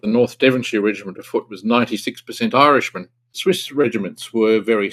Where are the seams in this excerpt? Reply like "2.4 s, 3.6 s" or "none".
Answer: 3.4 s